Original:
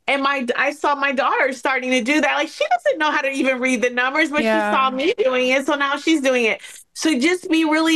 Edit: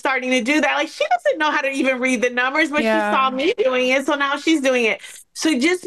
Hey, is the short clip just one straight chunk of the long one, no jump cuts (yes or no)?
yes